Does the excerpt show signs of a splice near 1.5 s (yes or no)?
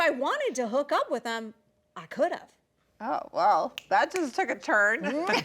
no